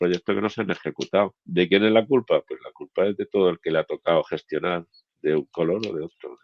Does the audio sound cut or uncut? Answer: cut